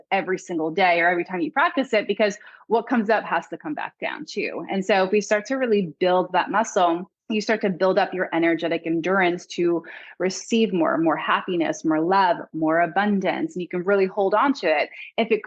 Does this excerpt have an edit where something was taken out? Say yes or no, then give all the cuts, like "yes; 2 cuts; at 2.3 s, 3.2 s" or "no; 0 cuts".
yes; 1 cut; at 7.1 s